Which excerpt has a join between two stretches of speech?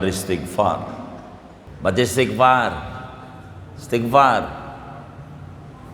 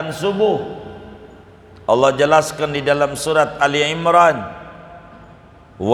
first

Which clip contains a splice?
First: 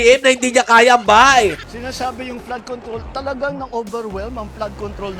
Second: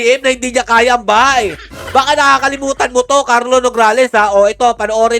first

